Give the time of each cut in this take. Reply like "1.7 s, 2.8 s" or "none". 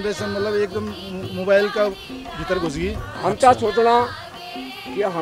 3.1 s